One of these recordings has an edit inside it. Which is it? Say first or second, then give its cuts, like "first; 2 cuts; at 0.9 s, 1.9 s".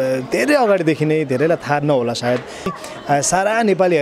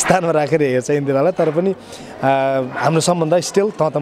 first; 1 cut; at 2.7 s